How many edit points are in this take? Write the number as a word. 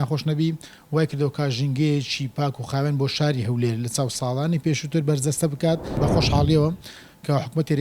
one